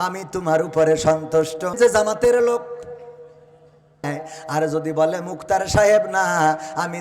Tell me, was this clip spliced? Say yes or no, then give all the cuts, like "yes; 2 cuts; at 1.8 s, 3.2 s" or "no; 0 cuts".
yes; 2 cuts; at 1.7 s, 4.1 s